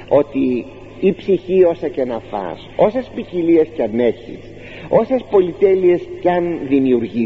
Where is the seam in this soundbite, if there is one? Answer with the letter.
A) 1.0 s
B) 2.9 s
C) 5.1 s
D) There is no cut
D